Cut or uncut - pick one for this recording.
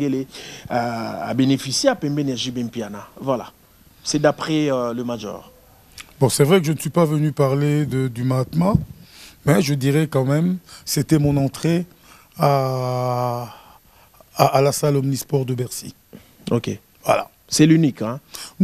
uncut